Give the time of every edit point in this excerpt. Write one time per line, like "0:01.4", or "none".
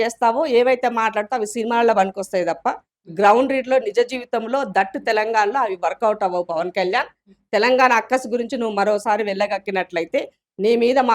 none